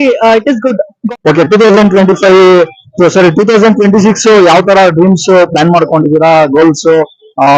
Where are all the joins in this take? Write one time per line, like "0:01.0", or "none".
0:00.9